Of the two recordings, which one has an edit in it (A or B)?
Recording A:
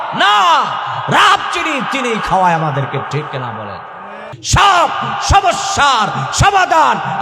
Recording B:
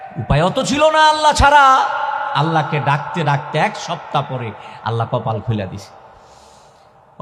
A